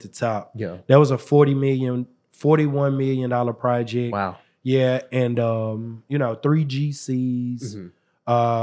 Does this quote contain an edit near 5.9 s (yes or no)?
yes